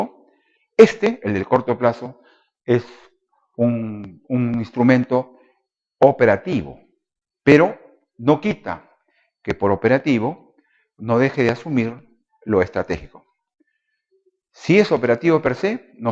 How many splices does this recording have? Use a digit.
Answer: 1